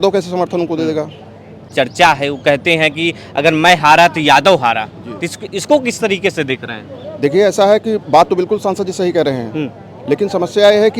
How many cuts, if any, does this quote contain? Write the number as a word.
one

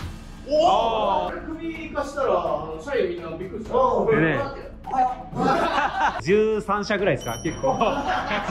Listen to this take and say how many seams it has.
two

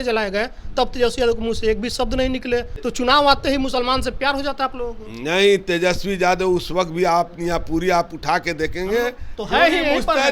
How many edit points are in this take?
one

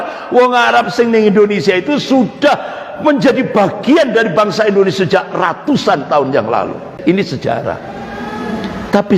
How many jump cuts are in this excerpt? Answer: one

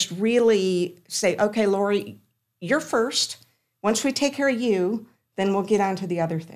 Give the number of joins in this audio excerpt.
zero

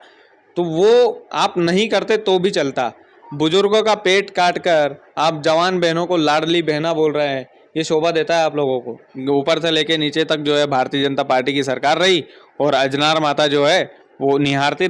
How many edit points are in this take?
one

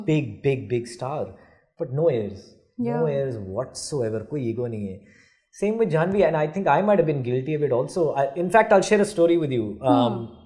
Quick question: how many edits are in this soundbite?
zero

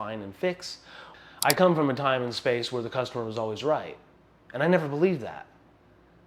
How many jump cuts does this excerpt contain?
one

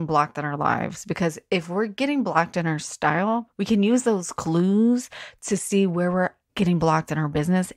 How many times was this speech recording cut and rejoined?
two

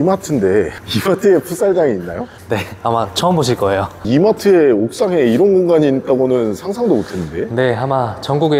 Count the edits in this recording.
one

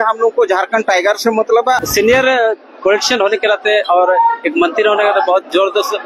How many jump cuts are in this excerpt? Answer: one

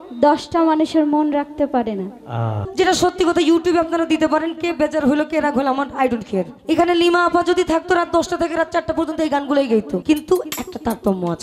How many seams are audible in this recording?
three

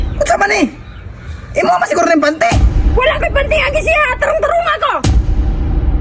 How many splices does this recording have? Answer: one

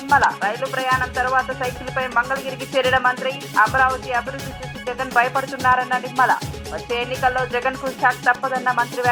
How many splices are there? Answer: zero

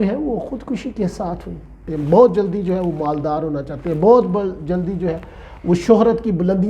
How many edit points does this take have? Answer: one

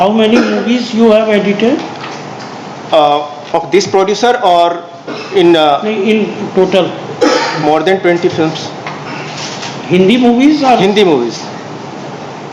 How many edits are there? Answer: zero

